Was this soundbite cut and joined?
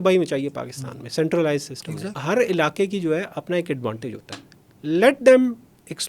yes; 1 cut; at 2.2 s

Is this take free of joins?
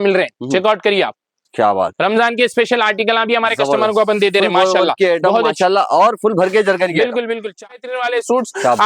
no; 1 cut; at 7.6 s

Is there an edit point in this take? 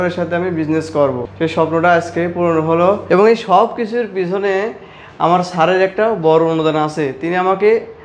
yes; 2 cuts; at 1.3 s, 3.0 s

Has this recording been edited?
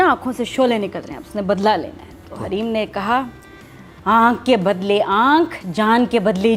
no; 0 cuts

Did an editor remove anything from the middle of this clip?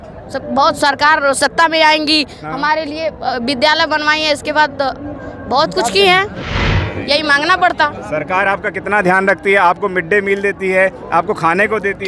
yes; 1 cut; at 6.4 s

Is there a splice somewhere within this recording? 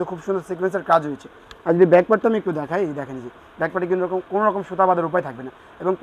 no; 0 cuts

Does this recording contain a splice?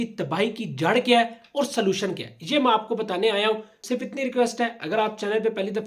yes; 1 cut; at 3.8 s

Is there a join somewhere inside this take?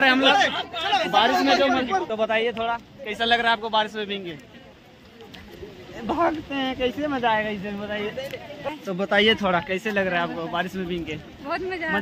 yes; 2 cuts; at 2.1 s, 8.7 s

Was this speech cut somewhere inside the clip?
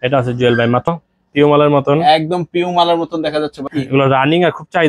yes; 2 cuts; at 0.9 s, 3.6 s

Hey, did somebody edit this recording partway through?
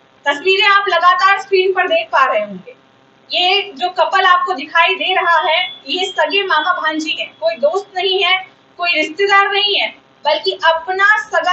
no; 0 cuts

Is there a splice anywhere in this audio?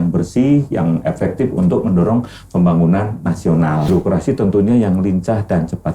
yes; 1 cut; at 3.8 s

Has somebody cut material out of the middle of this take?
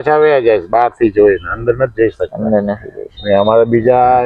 no; 0 cuts

